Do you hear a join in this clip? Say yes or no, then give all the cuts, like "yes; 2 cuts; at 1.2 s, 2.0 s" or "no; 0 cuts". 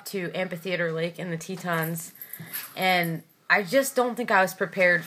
no; 0 cuts